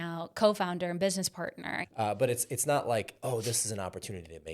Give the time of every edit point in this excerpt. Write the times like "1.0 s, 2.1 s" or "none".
1.8 s